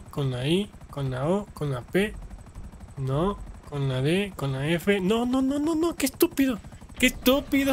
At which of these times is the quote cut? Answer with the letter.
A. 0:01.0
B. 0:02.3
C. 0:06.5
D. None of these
D